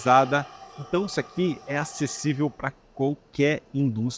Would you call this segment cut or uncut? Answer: uncut